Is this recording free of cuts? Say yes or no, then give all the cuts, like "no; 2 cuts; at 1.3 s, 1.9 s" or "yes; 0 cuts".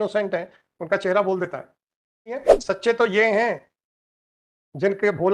no; 1 cut; at 2.5 s